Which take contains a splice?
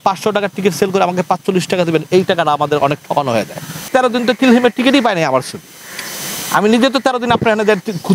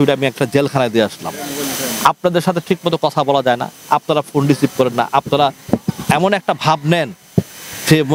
first; 1 cut; at 3.8 s

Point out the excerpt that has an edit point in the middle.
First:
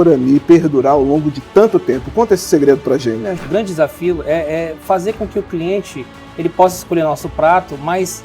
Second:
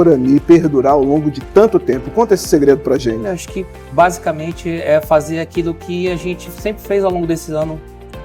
first; 1 cut; at 3.4 s

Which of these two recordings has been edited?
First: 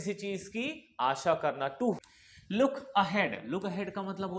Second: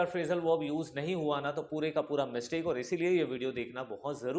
first; 1 cut; at 2.0 s

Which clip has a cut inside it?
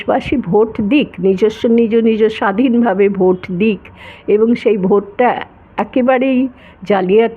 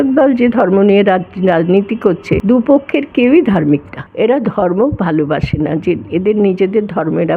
second; 2 cuts; at 2.4 s, 4.0 s

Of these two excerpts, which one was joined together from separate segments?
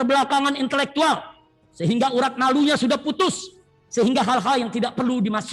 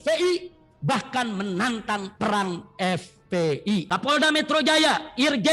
second; 1 cut; at 3.9 s

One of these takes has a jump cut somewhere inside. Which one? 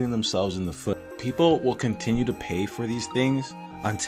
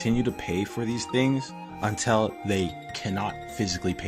first; 1 cut; at 1.1 s

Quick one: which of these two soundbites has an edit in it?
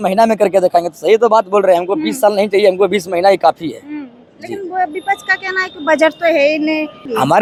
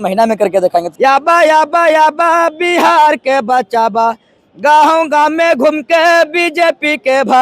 second; 1 cut; at 0.9 s

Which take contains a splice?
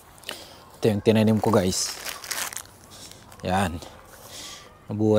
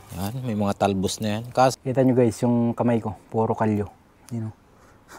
second; 1 cut; at 1.7 s

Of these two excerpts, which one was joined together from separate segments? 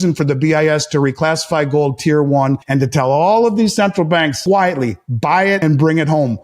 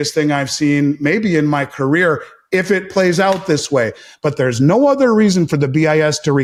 first; 3 cuts; at 2.6 s, 4.4 s, 5.6 s

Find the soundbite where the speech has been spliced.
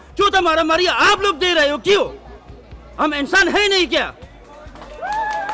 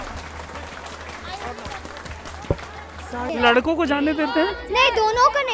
second; 1 cut; at 3.3 s

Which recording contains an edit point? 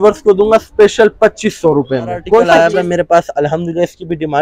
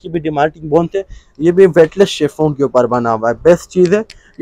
first; 1 cut; at 2.5 s

